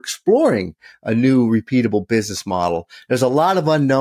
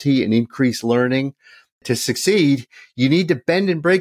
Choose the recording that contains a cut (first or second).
second